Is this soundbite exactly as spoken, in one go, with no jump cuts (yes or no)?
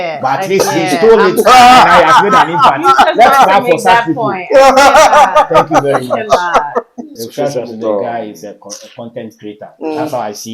no